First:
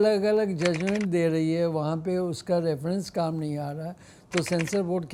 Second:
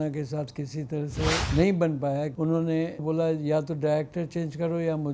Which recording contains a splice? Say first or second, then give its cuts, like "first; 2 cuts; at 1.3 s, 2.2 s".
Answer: second; 3 cuts; at 1.5 s, 2.3 s, 3.0 s